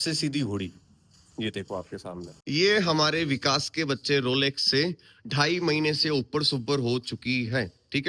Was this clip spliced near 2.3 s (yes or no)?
no